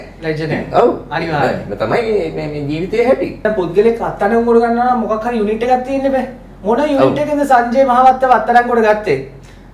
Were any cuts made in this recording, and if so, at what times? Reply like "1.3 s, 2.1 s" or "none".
none